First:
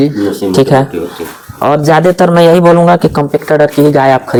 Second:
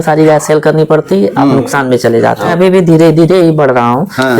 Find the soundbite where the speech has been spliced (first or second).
second